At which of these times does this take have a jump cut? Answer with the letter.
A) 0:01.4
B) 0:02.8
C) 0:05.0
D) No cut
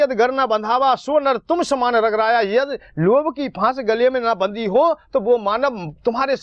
D